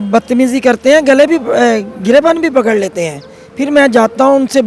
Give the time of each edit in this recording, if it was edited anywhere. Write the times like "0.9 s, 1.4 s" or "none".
none